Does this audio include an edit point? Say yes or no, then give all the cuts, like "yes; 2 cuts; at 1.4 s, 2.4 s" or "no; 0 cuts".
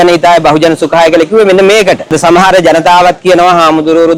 yes; 1 cut; at 2.1 s